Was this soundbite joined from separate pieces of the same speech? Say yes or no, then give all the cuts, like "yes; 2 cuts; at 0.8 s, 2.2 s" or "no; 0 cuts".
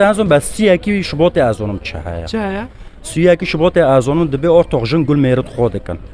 no; 0 cuts